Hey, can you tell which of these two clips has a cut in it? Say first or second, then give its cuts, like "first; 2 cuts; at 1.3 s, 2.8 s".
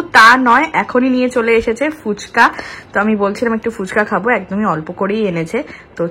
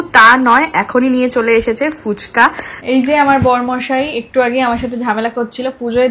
second; 1 cut; at 2.7 s